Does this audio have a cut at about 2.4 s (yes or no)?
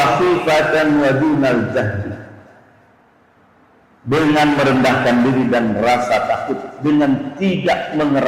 no